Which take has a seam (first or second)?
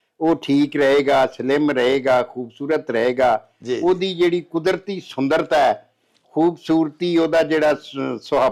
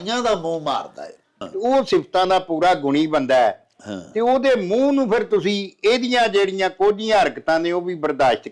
second